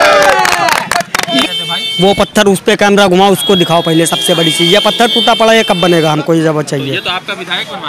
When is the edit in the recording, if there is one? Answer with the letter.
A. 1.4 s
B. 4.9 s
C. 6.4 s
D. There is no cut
A